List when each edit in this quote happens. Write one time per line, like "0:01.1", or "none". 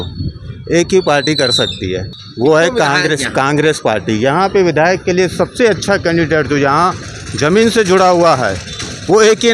0:02.2